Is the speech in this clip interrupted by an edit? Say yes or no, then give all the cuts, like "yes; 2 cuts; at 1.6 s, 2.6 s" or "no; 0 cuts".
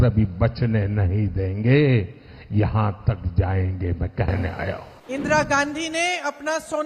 yes; 1 cut; at 4.9 s